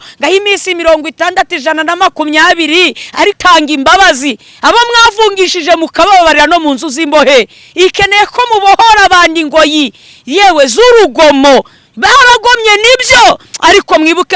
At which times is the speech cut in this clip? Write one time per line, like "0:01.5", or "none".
0:03.4